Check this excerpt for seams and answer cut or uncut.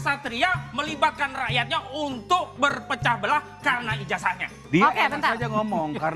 uncut